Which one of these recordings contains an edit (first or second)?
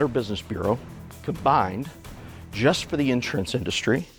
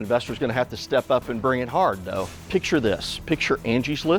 second